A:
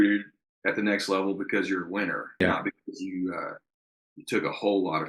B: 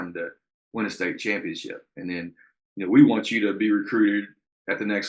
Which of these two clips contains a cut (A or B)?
A